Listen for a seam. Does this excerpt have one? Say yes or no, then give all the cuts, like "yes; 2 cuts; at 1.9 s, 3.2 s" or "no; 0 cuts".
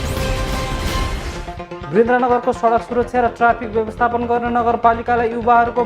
yes; 1 cut; at 1.2 s